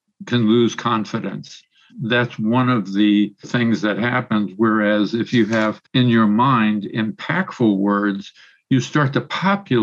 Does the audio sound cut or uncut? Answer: cut